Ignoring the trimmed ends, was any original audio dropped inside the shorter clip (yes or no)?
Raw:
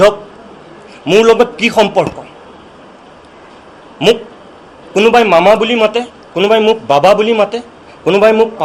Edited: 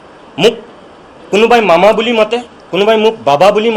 no